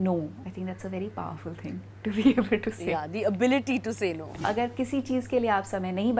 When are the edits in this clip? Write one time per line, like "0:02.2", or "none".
0:02.8
0:04.3